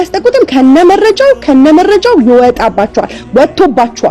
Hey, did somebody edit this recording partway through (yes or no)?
no